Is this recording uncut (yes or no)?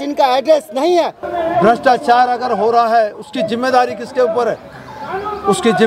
no